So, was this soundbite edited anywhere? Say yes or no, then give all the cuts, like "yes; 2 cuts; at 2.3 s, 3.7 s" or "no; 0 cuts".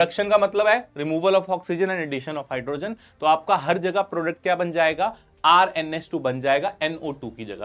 no; 0 cuts